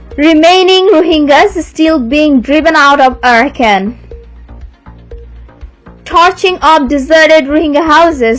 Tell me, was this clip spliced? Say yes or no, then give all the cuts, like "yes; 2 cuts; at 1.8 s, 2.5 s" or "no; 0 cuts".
no; 0 cuts